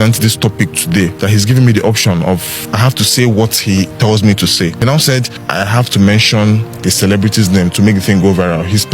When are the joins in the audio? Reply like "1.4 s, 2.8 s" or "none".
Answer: 1.1 s, 2.6 s, 5.1 s, 6.7 s